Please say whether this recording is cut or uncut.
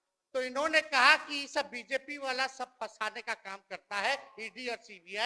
uncut